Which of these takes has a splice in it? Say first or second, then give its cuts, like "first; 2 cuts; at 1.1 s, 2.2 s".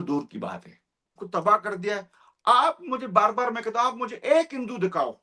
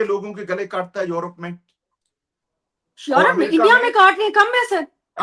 first; 1 cut; at 1.2 s